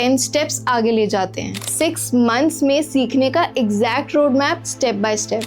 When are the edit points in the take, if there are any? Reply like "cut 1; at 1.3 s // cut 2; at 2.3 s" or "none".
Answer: cut 1; at 1.6 s